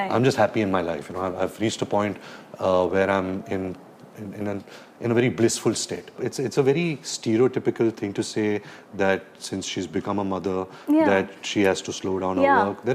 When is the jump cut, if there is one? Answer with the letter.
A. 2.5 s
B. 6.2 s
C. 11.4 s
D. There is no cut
B